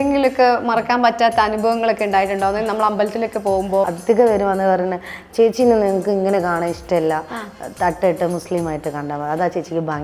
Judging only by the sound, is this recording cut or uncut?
cut